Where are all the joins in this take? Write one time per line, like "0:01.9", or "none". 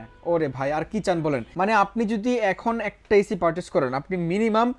0:01.5